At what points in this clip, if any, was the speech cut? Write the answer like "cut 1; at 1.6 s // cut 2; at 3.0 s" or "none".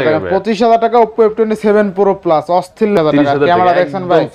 cut 1; at 3.0 s